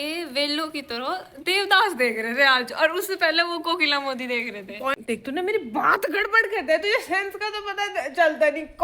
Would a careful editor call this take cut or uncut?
cut